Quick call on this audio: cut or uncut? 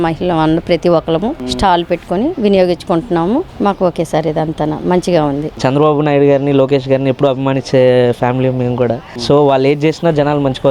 cut